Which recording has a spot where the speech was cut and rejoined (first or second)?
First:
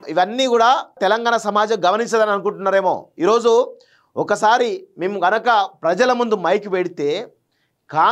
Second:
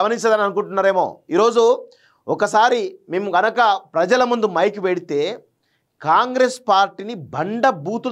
first